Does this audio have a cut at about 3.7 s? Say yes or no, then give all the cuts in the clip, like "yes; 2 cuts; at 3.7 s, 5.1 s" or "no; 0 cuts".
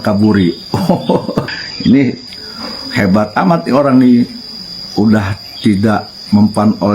no; 1 cut; at 1.5 s